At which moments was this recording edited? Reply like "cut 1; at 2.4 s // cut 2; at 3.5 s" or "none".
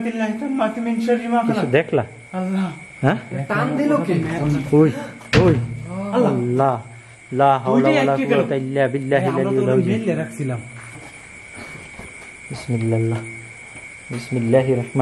cut 1; at 11.1 s